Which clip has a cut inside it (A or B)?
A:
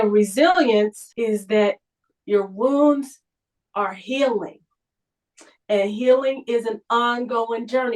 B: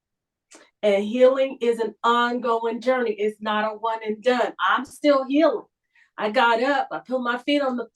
A